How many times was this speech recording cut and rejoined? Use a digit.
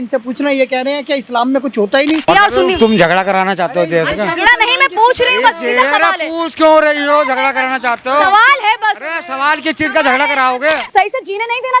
2